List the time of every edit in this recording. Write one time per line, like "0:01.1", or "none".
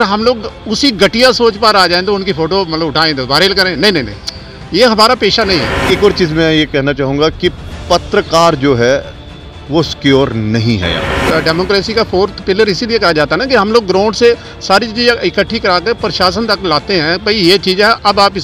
0:05.8
0:11.2